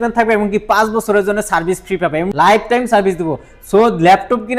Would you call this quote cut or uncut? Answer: cut